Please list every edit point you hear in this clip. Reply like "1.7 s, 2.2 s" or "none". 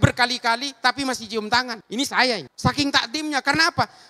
2.4 s